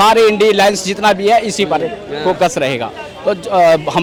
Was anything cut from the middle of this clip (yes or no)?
no